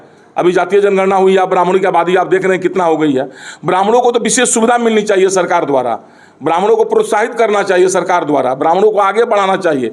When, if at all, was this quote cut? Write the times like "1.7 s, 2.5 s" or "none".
none